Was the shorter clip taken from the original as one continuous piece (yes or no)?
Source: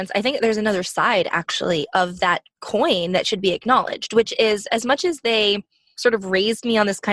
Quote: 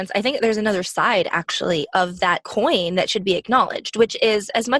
no